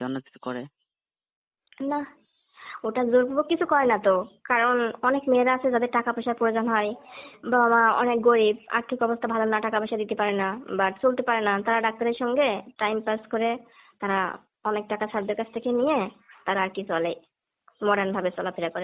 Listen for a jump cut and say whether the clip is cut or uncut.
uncut